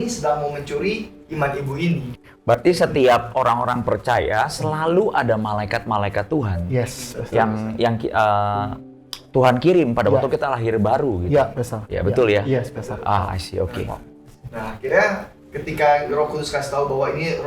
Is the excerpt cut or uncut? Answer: uncut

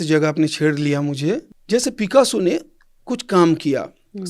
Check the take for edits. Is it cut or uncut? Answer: cut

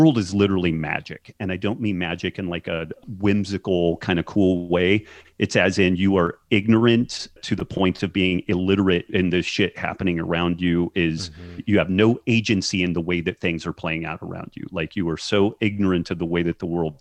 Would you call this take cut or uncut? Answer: cut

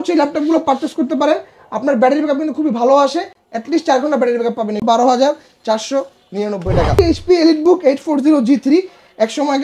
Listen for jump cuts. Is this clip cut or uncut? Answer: cut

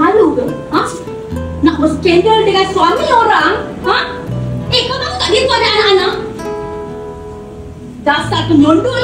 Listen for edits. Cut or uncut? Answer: uncut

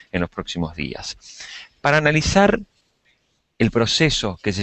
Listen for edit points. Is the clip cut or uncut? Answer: uncut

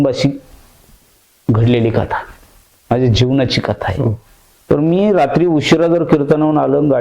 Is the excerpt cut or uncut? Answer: cut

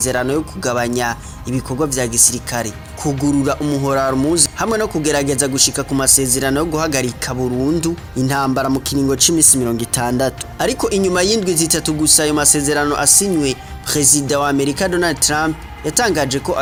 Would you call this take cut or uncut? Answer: uncut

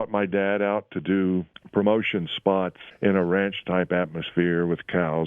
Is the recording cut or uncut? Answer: cut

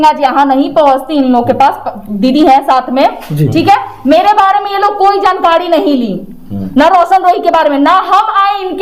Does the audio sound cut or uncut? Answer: uncut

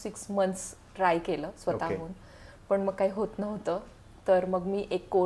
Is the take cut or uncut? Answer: uncut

